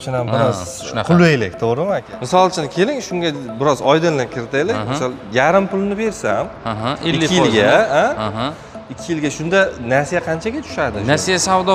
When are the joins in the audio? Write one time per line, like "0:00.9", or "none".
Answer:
0:02.1